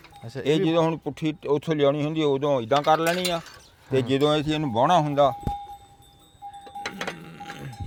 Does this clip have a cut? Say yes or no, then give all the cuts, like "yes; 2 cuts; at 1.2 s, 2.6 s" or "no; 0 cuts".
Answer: no; 0 cuts